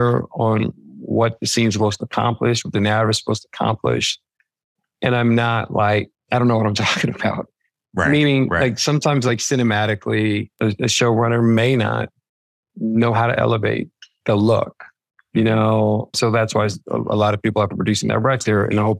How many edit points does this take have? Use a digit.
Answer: 2